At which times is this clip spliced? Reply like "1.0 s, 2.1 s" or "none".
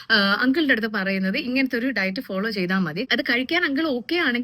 3.0 s